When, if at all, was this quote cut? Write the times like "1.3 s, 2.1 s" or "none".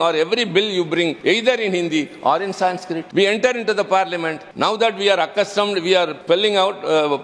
1.2 s, 3.0 s, 4.4 s, 6.2 s

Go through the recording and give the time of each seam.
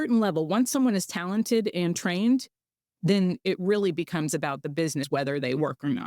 5.1 s

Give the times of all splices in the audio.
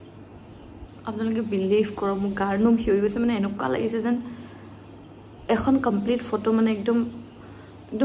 none

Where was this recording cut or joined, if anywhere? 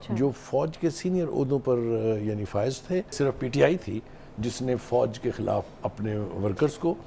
3.1 s

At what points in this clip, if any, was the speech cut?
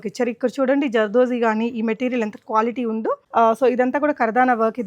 3.2 s

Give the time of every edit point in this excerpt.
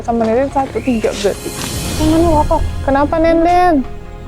1.8 s

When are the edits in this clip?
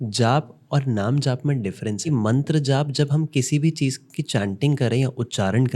2.1 s

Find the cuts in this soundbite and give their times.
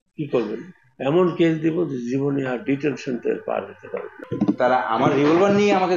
4.2 s

